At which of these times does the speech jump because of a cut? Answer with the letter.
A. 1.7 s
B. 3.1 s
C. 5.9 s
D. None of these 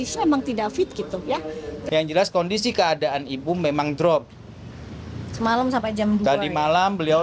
A